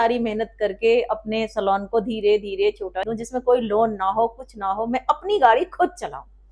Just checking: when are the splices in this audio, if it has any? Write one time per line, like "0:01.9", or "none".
0:03.1